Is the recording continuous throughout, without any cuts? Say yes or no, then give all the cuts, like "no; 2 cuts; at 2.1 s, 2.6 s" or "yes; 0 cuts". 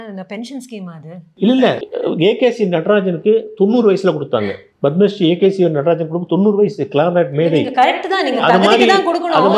no; 1 cut; at 1.8 s